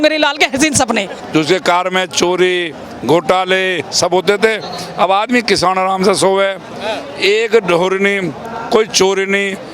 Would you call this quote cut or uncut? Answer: cut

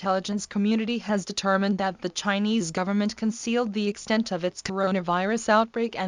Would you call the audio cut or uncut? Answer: uncut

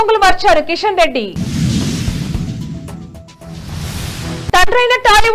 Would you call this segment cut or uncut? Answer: cut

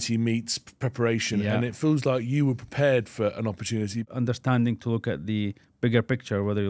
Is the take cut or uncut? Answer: cut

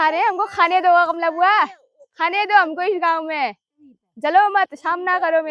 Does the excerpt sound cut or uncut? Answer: uncut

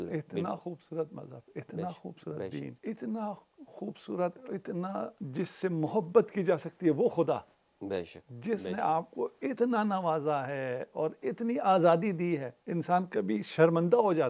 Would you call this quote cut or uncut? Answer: cut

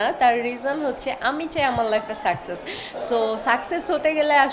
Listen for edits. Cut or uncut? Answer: uncut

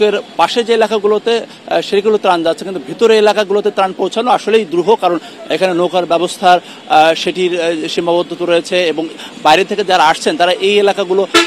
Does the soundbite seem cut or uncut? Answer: uncut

